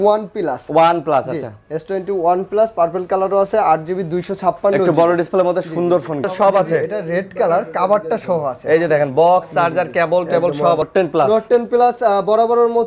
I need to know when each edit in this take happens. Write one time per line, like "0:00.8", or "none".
0:06.2
0:10.8